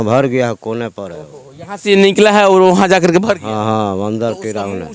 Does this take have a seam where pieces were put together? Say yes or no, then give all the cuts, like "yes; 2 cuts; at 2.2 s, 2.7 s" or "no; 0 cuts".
no; 0 cuts